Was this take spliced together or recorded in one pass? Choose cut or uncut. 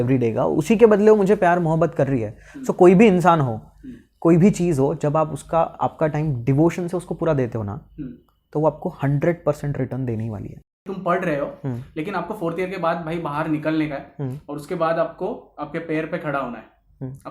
cut